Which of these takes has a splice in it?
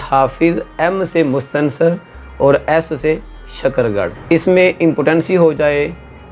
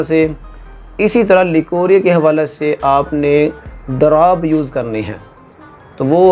first; 1 cut; at 4.2 s

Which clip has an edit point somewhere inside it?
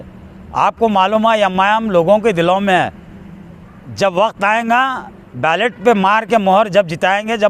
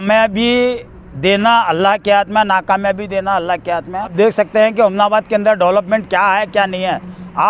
second; 1 cut; at 4.1 s

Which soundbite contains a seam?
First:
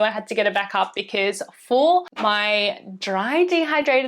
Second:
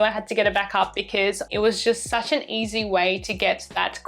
second; 1 cut; at 1.5 s

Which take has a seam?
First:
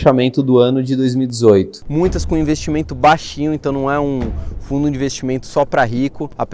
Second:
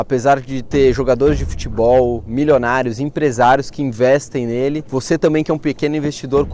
first; 1 cut; at 1.8 s

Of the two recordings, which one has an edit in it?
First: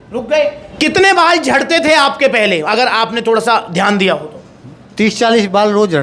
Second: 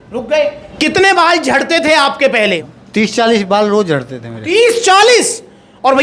second; 1 cut; at 2.6 s

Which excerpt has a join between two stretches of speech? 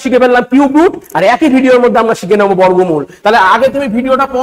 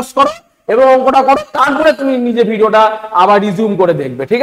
first; 1 cut; at 3.1 s

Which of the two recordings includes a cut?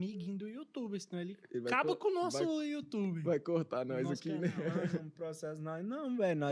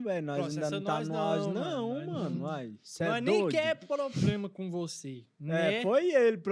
first; 2 cuts; at 1.4 s, 5.1 s

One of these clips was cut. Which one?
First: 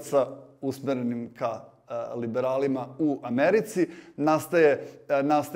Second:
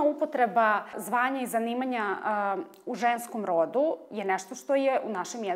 second; 1 cut; at 1.0 s

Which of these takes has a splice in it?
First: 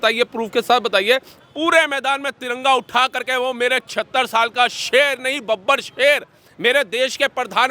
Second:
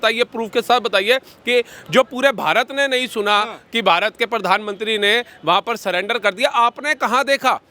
first; 1 cut; at 1.4 s

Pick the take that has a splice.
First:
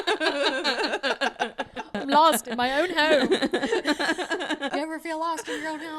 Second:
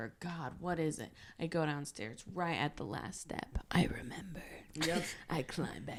first; 2 cuts; at 1.9 s, 4.7 s

